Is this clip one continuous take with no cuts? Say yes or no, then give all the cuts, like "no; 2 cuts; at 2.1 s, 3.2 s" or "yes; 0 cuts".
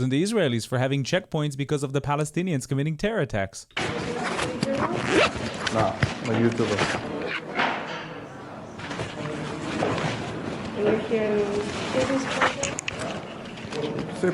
no; 1 cut; at 3.8 s